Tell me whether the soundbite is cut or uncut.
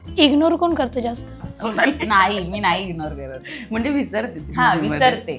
cut